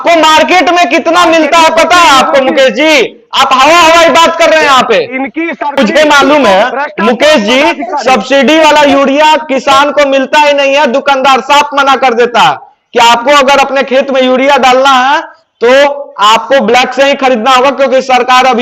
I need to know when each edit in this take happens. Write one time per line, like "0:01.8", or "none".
0:05.8

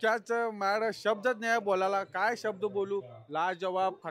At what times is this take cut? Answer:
none

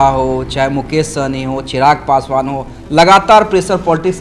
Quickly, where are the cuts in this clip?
none

